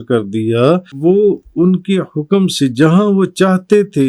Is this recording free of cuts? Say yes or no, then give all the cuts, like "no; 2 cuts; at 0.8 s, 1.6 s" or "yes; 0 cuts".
no; 1 cut; at 0.9 s